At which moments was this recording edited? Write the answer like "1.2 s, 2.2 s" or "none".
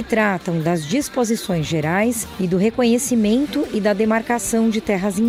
none

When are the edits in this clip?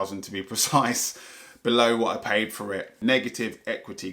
2.9 s

